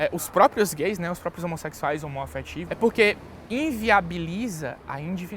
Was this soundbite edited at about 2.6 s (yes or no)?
yes